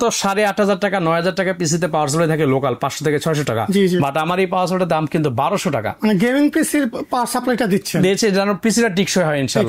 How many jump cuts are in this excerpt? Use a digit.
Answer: 0